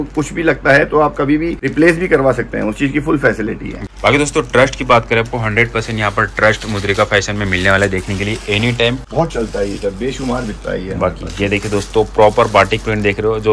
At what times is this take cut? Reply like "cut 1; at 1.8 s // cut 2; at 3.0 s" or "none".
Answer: cut 1; at 1.6 s // cut 2; at 3.8 s // cut 3; at 9.0 s